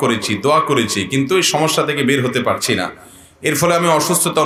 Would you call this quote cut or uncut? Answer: uncut